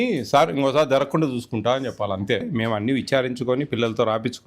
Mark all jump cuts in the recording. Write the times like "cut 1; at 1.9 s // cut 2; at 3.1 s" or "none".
cut 1; at 2.5 s